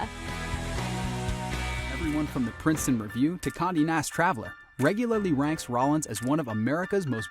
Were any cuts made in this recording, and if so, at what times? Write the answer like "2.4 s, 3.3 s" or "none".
1.9 s